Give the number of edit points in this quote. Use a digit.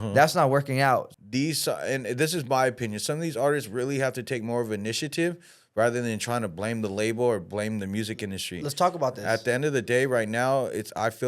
1